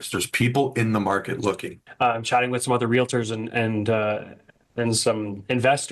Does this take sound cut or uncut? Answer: cut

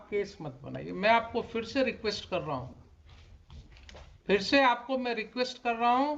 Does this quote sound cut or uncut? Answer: uncut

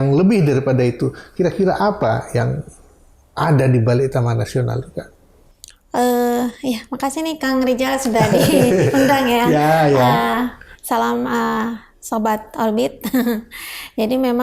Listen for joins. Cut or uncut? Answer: uncut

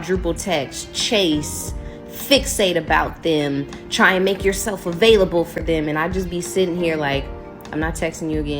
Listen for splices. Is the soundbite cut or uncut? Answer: cut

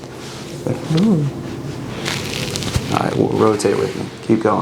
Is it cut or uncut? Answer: cut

